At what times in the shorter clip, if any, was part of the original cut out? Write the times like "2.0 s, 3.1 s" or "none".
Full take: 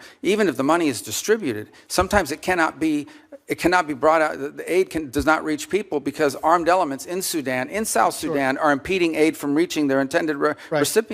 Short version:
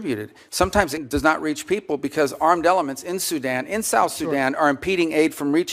1.0 s

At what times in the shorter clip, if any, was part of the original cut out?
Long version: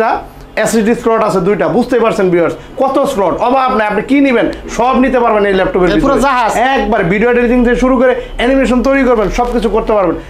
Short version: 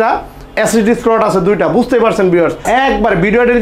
2.6 s

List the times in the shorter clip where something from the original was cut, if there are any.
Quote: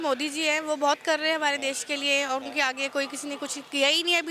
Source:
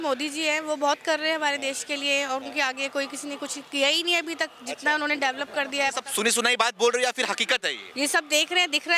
none

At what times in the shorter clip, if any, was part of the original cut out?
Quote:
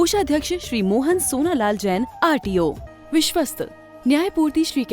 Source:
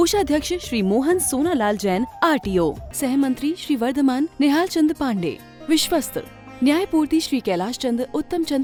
2.9 s

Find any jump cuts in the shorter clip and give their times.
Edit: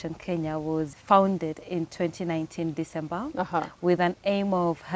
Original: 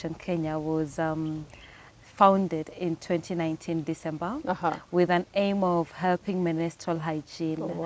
0.9 s

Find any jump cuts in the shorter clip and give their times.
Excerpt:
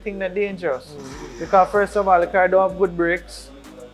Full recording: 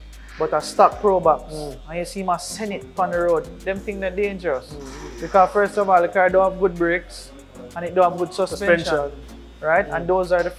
none

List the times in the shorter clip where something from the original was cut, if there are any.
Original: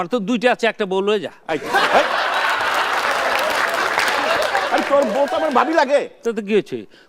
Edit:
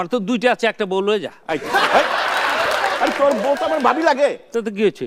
2.5 s

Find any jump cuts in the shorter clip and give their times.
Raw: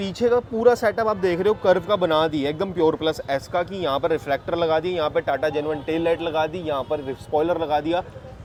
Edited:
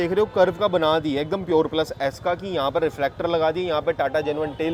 none

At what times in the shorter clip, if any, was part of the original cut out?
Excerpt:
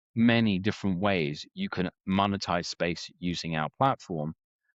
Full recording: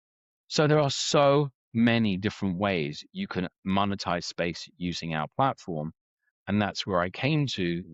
none

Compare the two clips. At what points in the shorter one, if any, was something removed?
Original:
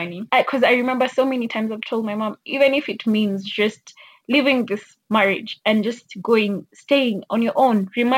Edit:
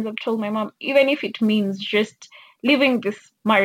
none

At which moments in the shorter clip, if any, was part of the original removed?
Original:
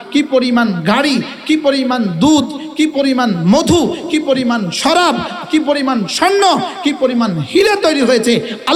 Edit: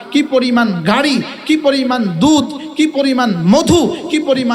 none

